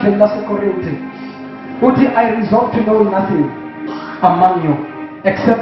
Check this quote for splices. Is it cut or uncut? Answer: uncut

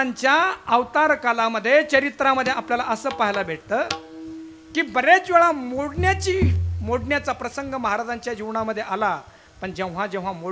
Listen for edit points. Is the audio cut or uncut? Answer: uncut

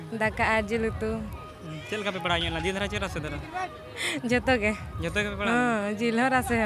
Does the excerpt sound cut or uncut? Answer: uncut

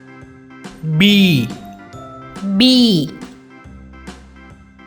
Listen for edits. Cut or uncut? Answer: cut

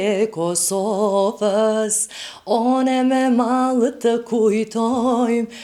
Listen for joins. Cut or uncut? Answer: uncut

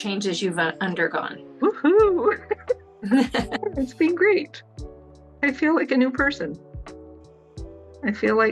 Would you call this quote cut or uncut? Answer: cut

